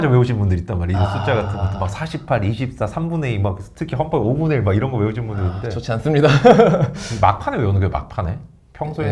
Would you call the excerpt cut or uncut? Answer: uncut